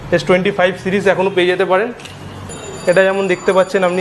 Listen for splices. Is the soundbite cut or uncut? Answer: cut